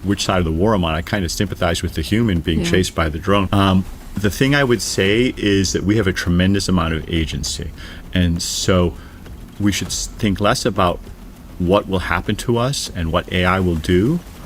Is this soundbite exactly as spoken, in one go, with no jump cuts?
no; 1 cut; at 3.5 s

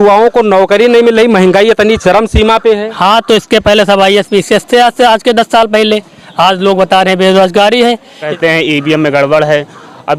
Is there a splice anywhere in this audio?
yes; 1 cut; at 8.3 s

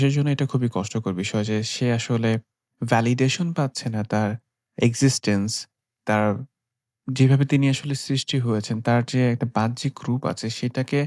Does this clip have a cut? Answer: no; 0 cuts

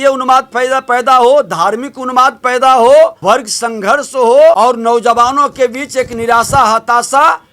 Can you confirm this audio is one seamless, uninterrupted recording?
no; 2 cuts; at 3.2 s, 4.6 s

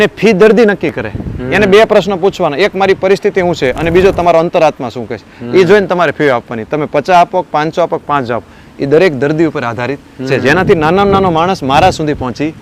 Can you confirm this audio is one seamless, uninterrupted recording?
yes; 0 cuts

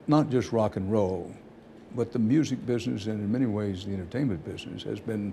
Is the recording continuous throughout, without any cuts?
yes; 0 cuts

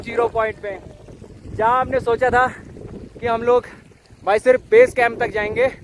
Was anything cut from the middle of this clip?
no; 0 cuts

